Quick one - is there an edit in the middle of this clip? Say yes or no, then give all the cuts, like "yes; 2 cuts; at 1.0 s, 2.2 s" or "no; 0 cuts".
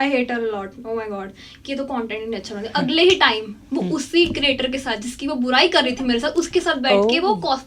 no; 0 cuts